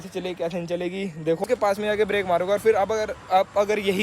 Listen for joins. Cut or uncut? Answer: cut